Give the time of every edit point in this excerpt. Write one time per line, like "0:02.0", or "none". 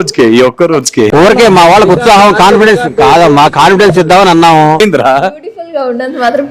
0:04.8